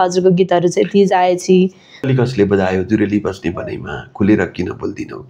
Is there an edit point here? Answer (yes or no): yes